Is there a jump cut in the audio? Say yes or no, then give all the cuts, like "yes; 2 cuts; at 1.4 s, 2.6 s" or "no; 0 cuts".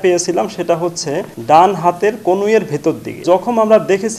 yes; 2 cuts; at 1.3 s, 3.2 s